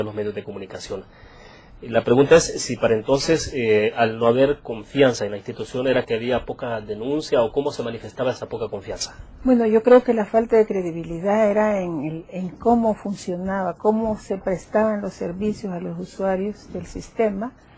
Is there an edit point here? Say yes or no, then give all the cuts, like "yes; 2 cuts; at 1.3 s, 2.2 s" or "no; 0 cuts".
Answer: no; 0 cuts